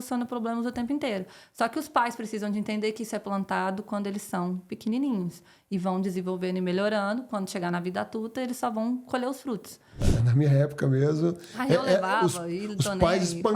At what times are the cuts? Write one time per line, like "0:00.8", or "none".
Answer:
0:10.1